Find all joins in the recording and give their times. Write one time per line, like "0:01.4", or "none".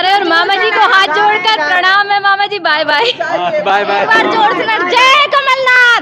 none